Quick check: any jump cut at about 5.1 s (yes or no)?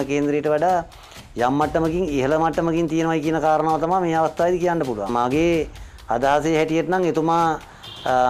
yes